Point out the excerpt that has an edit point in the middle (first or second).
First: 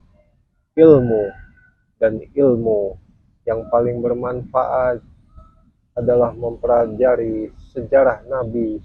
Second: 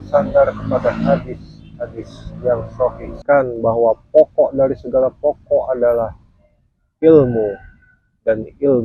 second